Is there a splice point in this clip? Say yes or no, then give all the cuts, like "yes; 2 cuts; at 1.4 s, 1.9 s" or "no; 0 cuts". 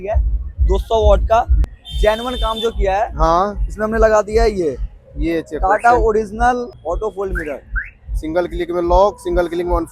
yes; 2 cuts; at 1.6 s, 6.8 s